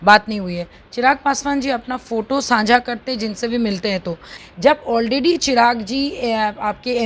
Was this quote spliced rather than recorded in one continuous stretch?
yes; 1 cut; at 4.3 s

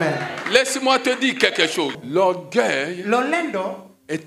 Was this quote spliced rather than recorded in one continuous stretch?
yes; 1 cut; at 2.0 s

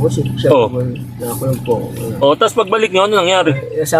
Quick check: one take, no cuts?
no; 1 cut; at 2.1 s

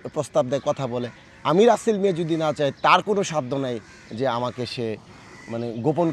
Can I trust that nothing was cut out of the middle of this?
yes; 0 cuts

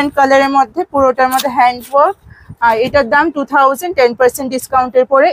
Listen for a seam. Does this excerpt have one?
no; 0 cuts

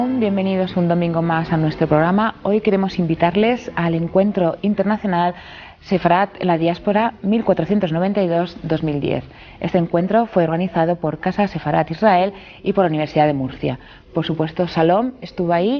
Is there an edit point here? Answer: yes; 1 cut; at 10.2 s

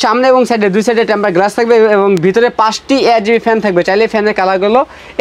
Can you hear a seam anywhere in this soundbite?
no; 0 cuts

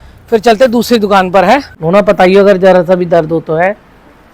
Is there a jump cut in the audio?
yes; 1 cut; at 1.7 s

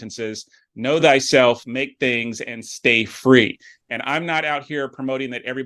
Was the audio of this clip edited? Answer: no; 0 cuts

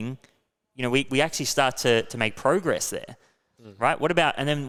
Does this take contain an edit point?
no; 0 cuts

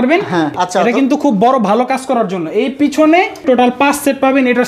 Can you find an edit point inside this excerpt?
yes; 1 cut; at 3.4 s

